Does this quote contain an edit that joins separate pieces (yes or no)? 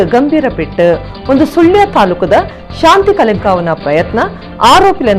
no